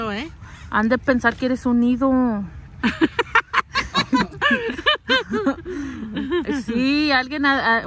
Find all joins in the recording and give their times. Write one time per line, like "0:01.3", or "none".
none